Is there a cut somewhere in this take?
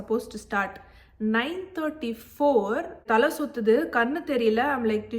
yes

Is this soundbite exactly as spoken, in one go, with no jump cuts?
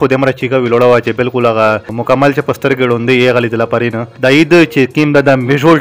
no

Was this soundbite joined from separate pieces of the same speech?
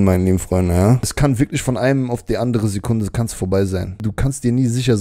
yes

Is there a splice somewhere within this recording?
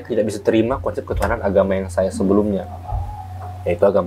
no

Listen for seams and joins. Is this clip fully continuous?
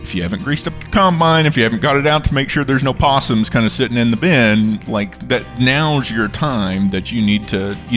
yes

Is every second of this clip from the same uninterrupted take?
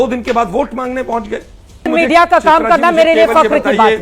no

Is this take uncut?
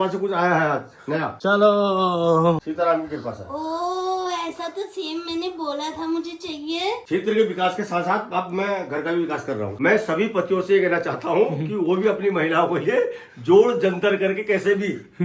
no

